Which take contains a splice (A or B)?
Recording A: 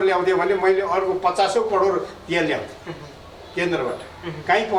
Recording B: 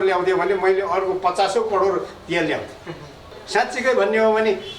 B